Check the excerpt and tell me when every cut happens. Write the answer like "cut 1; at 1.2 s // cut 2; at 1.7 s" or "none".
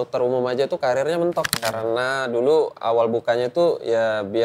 cut 1; at 1.6 s